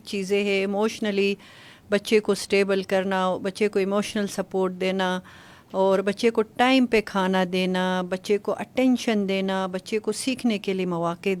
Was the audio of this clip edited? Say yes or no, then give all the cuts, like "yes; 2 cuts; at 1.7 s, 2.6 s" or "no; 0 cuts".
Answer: no; 0 cuts